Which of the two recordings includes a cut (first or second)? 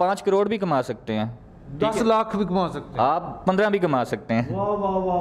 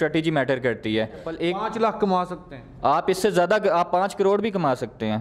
second